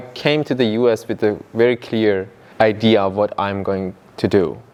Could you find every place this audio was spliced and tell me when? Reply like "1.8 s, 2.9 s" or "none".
none

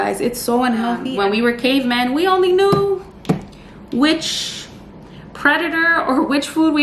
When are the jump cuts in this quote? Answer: 1.0 s

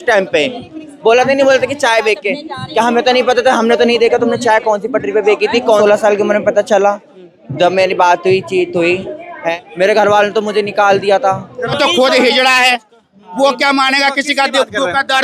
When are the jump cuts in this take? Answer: 5.8 s, 9.5 s, 11.7 s

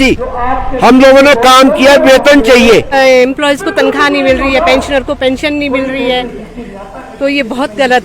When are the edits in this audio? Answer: 2.9 s

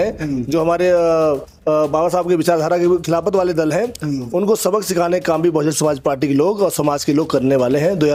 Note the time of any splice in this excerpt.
none

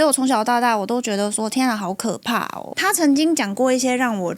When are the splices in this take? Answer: 2.7 s

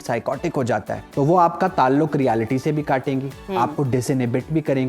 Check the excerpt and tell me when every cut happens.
1.0 s

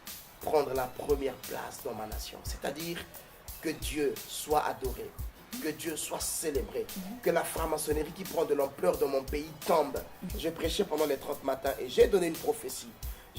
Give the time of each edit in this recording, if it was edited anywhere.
10.2 s

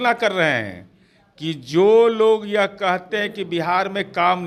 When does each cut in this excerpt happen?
none

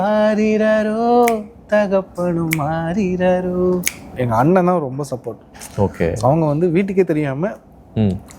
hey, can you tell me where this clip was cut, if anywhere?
4.2 s

